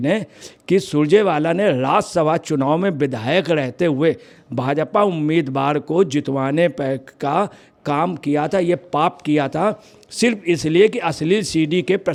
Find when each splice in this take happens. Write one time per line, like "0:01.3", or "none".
none